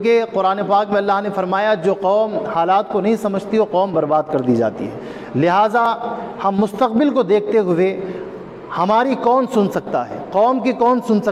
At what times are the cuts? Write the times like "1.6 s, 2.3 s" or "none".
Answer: none